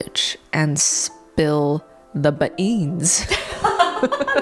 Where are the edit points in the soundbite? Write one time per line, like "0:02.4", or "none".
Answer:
none